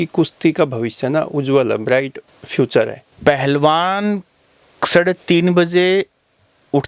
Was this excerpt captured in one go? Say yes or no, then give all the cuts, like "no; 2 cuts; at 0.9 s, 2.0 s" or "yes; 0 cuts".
no; 1 cut; at 3.0 s